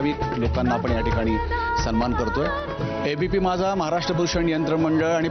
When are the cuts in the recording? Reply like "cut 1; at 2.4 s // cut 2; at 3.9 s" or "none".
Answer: cut 1; at 2.7 s